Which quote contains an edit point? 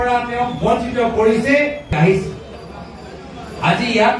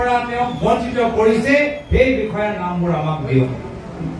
first; 1 cut; at 1.9 s

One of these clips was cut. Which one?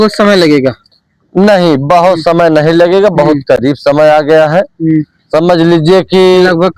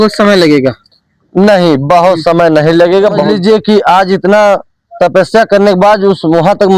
second; 1 cut; at 3.3 s

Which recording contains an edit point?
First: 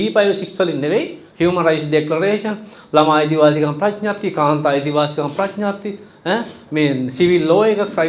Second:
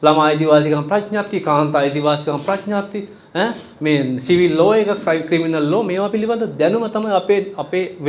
first; 1 cut; at 1.2 s

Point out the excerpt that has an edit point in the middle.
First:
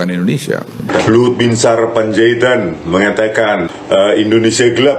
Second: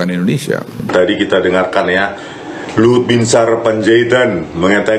first; 1 cut; at 0.9 s

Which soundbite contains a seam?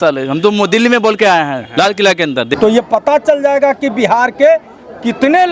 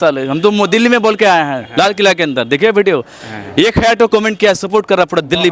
first; 1 cut; at 2.5 s

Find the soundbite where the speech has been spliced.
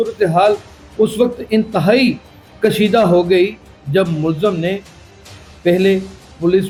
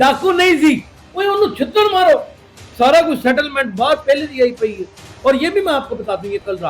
second; 1 cut; at 1.0 s

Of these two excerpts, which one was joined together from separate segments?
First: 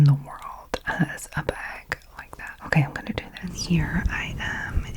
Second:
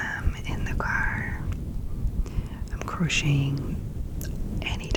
first; 2 cuts; at 2.5 s, 3.6 s

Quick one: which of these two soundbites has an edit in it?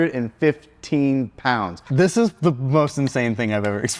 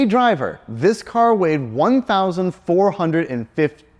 first; 1 cut; at 1.8 s

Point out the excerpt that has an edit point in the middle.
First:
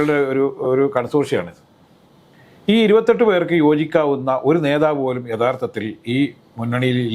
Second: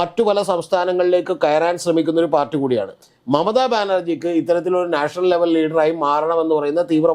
second; 1 cut; at 3.0 s

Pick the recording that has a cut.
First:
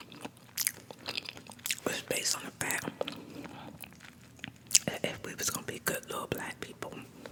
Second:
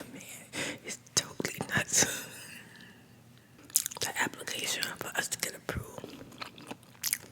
second; 1 cut; at 3.6 s

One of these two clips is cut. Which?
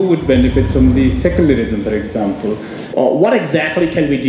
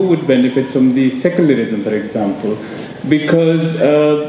first; 1 cut; at 2.8 s

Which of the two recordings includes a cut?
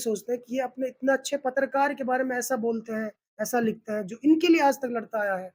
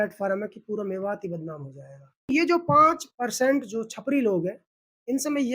second; 1 cut; at 2.3 s

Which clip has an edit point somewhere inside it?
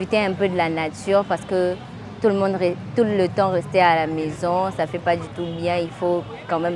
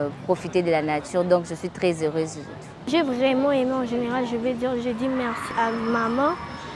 second; 2 cuts; at 2.9 s, 5.4 s

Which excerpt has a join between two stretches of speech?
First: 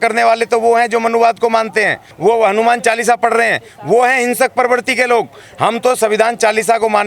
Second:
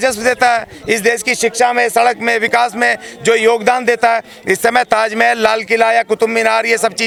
first; 1 cut; at 2.1 s

